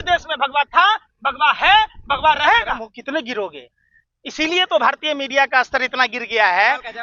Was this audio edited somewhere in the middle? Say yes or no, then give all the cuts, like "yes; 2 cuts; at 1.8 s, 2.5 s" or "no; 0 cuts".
yes; 1 cut; at 2.9 s